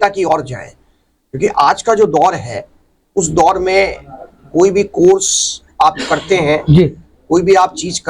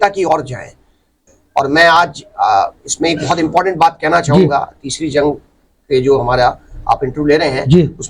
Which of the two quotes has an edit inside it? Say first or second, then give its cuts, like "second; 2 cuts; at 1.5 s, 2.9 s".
second; 1 cut; at 1.2 s